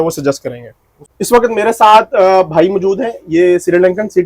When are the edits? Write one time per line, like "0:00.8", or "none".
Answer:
0:01.1